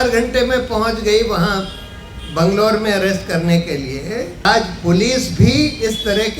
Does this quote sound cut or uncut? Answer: cut